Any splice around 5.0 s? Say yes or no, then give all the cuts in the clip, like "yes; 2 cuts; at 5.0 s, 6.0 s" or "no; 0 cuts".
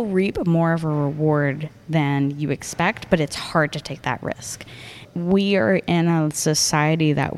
yes; 1 cut; at 5.0 s